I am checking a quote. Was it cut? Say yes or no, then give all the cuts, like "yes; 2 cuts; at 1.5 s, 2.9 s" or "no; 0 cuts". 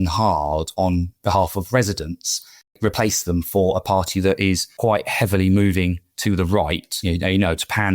yes; 2 cuts; at 2.7 s, 7.0 s